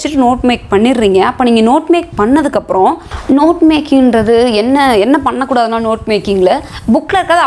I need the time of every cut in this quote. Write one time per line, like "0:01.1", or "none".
0:03.1